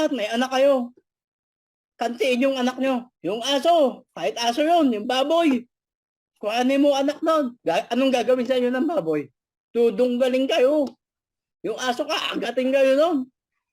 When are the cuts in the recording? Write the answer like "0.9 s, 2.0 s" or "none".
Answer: 3.1 s, 7.5 s